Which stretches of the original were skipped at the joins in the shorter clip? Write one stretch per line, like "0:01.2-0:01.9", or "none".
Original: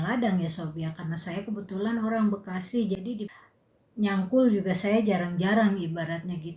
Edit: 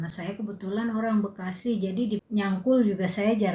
0:03.3-0:03.9